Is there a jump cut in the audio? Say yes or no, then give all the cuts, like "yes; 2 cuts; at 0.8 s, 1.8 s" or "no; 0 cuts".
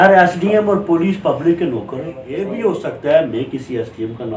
yes; 1 cut; at 2.5 s